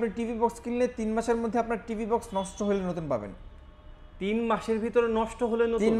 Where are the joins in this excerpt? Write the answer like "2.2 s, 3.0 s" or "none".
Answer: none